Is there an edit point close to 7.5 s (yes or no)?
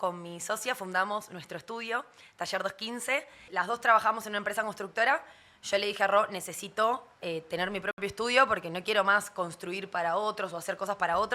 no